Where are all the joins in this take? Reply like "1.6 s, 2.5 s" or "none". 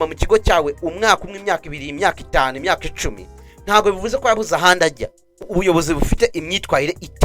5.4 s